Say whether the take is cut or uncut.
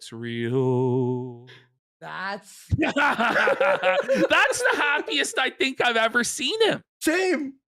cut